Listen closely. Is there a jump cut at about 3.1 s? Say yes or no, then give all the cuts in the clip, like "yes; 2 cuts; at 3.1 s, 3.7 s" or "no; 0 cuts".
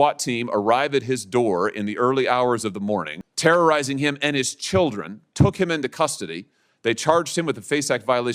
yes; 1 cut; at 3.1 s